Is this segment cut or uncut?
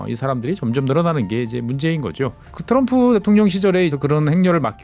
cut